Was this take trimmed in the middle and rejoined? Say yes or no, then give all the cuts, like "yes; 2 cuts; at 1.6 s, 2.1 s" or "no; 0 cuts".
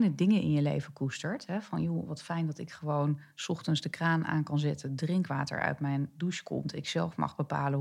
no; 0 cuts